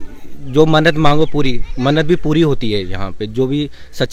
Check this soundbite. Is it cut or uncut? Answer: uncut